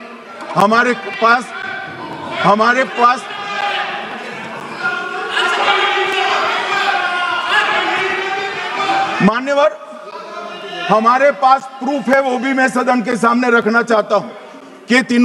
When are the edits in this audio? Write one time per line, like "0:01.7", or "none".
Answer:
none